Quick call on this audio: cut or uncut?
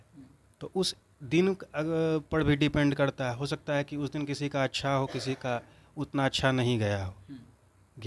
uncut